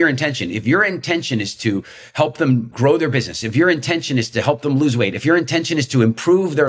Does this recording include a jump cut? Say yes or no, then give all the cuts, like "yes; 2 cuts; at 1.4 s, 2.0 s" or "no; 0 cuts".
no; 0 cuts